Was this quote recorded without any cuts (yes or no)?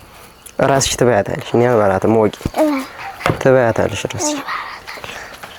yes